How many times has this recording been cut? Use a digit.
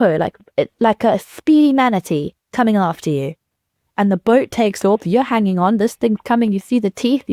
0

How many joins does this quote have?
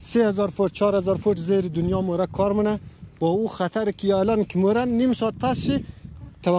0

